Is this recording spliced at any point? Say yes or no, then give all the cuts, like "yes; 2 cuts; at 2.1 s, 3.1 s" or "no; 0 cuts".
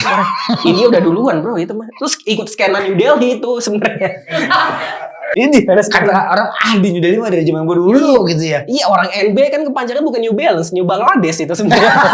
yes; 1 cut; at 5.3 s